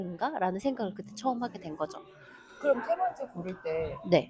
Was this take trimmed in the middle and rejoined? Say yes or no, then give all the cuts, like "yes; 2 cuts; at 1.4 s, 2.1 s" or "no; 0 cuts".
no; 0 cuts